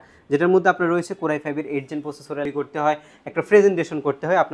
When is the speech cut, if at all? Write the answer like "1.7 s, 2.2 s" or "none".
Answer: 2.4 s